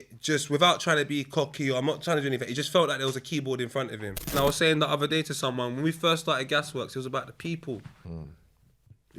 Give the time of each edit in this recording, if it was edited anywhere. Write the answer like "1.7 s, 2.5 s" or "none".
4.3 s